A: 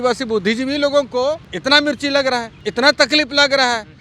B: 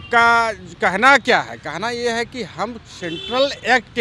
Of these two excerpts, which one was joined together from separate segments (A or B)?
A